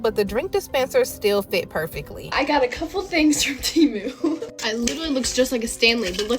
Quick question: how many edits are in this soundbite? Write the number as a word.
two